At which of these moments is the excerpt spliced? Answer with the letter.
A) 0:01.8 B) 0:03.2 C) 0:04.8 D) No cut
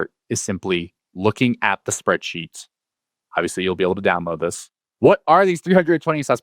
C